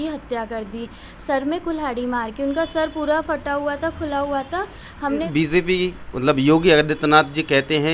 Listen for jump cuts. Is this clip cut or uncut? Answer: cut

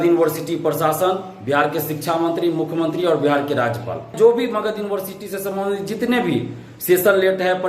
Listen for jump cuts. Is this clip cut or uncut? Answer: cut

